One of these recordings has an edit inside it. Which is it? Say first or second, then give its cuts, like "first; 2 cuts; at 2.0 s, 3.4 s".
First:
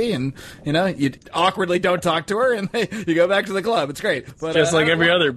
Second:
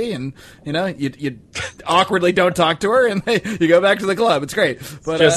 first; 2 cuts; at 1.2 s, 4.3 s